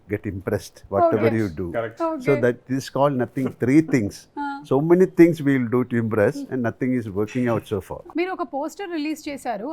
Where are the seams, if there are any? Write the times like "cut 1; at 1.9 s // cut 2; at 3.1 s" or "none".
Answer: cut 1; at 8.0 s